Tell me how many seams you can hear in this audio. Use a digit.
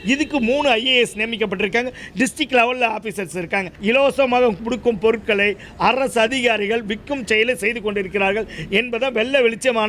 1